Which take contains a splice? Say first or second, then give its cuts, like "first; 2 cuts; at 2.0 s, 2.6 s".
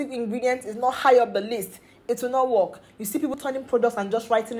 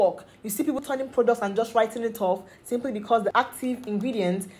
second; 1 cut; at 3.3 s